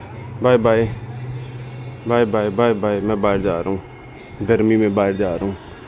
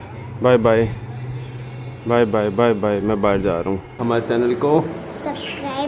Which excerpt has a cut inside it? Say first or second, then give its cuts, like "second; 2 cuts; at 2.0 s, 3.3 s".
second; 1 cut; at 3.9 s